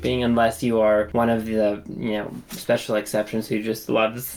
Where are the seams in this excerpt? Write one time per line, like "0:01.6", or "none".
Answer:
0:01.1